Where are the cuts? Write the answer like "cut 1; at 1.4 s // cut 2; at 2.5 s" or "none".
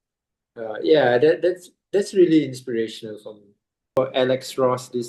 cut 1; at 3.9 s